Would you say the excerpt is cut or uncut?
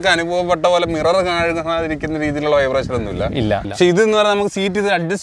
cut